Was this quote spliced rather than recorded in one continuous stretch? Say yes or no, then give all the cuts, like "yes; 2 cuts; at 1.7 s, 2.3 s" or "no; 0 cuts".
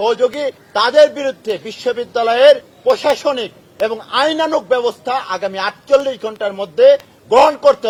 no; 0 cuts